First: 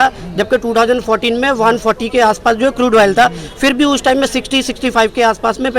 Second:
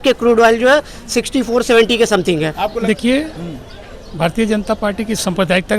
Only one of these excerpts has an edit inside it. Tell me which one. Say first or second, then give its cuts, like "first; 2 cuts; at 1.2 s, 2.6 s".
second; 1 cut; at 2.8 s